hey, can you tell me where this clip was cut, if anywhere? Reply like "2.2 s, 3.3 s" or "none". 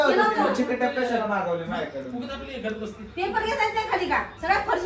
none